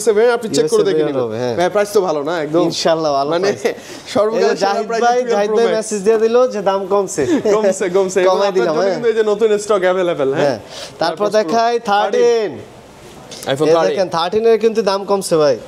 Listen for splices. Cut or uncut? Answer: uncut